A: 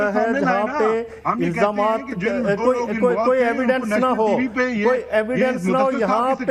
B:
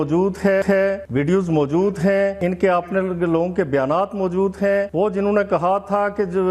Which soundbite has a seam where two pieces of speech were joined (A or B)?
B